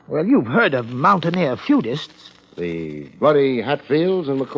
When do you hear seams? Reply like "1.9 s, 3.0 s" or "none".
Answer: 2.7 s